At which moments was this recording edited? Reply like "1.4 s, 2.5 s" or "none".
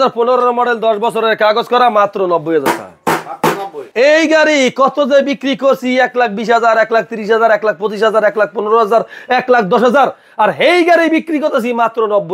3.8 s